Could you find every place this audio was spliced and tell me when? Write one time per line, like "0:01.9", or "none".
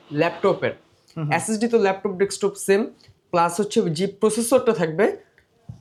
none